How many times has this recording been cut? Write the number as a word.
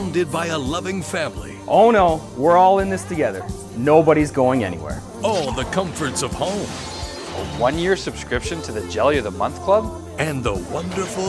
one